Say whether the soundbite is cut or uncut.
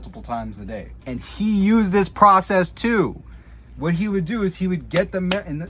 uncut